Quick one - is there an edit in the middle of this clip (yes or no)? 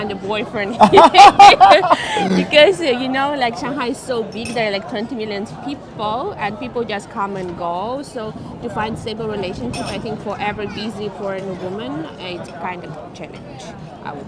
no